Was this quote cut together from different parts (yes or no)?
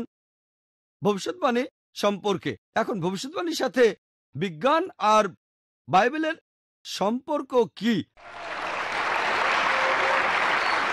no